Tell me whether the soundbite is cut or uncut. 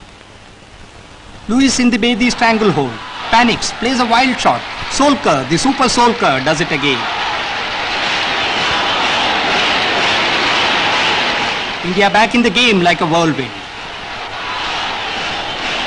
uncut